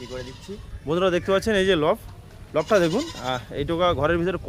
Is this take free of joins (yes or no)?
yes